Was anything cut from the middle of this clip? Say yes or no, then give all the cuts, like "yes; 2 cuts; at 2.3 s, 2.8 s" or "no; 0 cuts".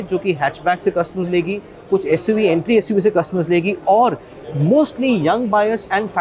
no; 0 cuts